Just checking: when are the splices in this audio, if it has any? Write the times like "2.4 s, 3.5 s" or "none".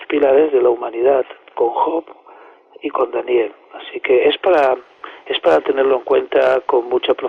2.2 s